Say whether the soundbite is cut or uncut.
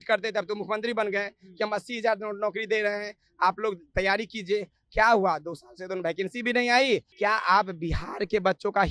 cut